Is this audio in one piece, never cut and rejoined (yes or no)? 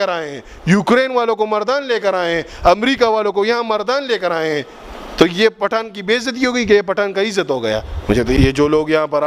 no